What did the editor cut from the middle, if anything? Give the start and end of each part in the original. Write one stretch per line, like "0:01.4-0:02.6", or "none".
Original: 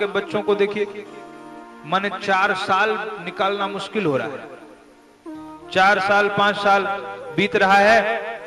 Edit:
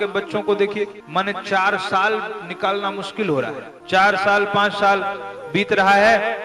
0:01.0-0:01.8
0:04.5-0:05.6